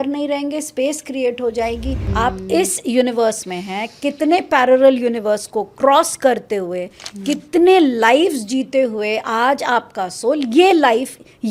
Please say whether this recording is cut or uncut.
cut